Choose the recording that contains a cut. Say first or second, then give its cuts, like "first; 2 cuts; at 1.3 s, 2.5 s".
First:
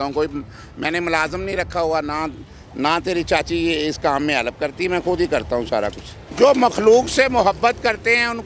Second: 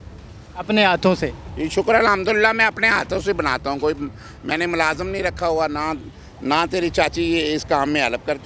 first; 1 cut; at 6.2 s